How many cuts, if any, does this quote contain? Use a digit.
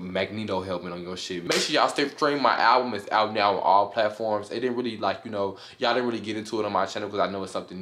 1